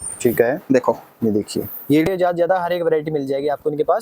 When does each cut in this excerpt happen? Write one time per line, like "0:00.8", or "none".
0:02.1